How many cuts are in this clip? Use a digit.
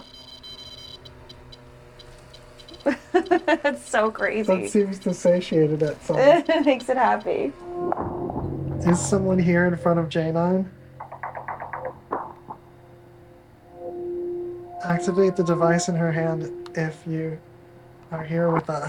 1